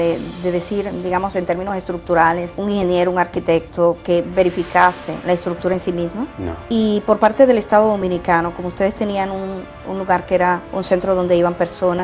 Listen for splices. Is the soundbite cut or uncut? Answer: uncut